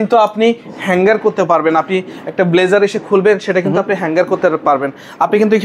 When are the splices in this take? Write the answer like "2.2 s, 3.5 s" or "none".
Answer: none